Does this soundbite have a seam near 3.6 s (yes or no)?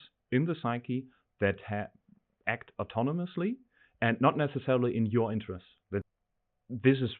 no